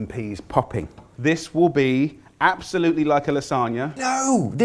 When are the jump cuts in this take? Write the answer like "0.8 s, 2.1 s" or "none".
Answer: 1.0 s

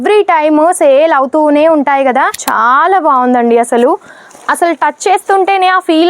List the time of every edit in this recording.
2.4 s

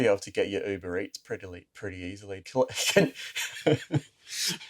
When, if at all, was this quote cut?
2.4 s

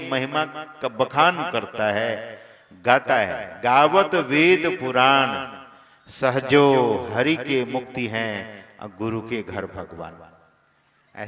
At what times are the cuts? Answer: none

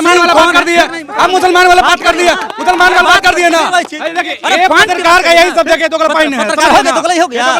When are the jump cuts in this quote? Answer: none

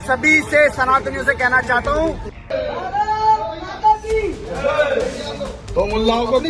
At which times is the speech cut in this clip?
2.3 s, 5.6 s

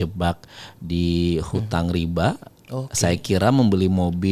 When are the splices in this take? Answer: none

